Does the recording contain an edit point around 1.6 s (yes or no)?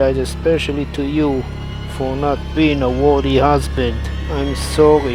no